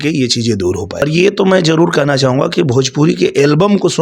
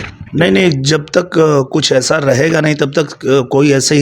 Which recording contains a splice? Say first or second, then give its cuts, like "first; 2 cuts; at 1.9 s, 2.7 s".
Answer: first; 1 cut; at 1.0 s